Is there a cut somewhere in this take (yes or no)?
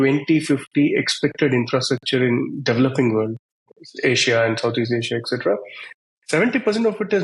no